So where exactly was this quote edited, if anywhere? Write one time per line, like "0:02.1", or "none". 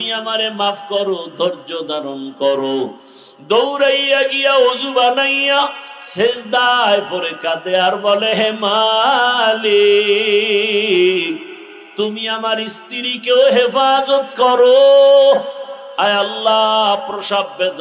none